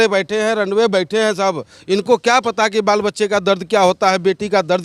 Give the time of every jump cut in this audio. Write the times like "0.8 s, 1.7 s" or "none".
none